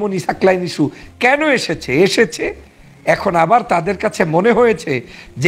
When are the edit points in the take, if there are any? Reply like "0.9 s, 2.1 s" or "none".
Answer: none